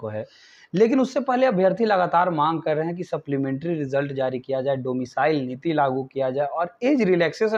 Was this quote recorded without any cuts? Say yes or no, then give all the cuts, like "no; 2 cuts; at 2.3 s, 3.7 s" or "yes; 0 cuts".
yes; 0 cuts